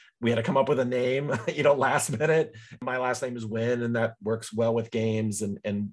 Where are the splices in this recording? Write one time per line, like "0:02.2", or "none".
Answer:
0:02.6